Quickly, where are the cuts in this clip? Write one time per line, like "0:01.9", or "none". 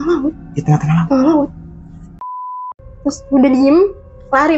0:02.4